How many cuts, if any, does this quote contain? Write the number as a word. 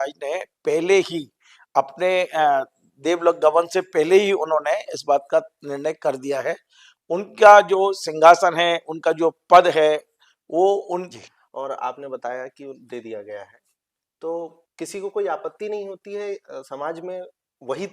one